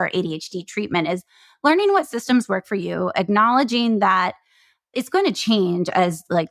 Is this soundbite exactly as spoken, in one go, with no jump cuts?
yes; 0 cuts

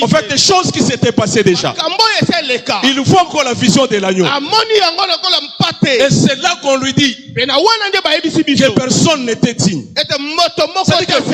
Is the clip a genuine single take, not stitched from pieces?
yes; 0 cuts

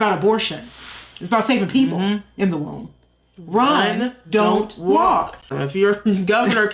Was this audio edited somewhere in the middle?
no; 0 cuts

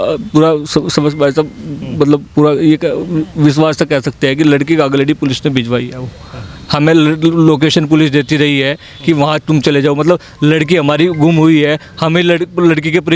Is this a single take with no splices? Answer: yes; 0 cuts

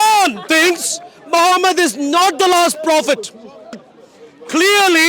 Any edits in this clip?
yes; 1 cut; at 3.9 s

